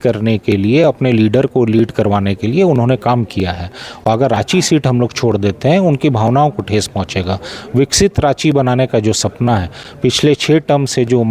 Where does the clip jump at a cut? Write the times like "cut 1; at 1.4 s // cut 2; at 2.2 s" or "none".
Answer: none